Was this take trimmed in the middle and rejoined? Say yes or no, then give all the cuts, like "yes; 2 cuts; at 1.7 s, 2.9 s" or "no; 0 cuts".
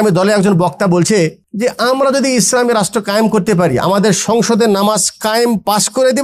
yes; 1 cut; at 1.4 s